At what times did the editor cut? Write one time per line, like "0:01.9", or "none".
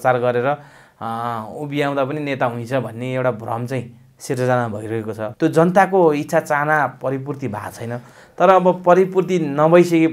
0:05.3